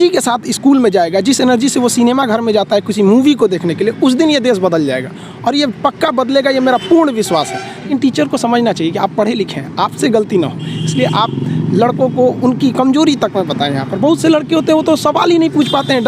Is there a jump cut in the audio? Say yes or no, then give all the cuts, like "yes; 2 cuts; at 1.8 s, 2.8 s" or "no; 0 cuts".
yes; 1 cut; at 7.8 s